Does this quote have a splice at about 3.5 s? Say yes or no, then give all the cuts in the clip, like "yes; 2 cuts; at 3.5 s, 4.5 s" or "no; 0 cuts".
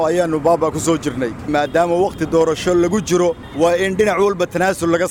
yes; 2 cuts; at 1.5 s, 3.5 s